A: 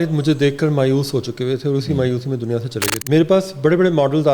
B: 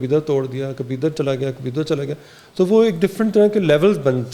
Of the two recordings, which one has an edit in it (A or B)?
A